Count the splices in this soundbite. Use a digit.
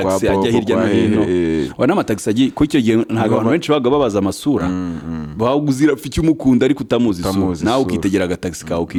0